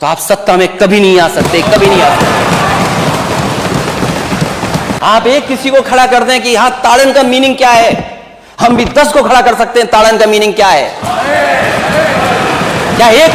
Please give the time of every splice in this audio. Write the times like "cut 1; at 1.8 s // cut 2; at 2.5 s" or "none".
cut 1; at 5.0 s